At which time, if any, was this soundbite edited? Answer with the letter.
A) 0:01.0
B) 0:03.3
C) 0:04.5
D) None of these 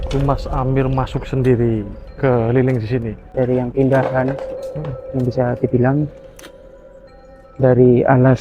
B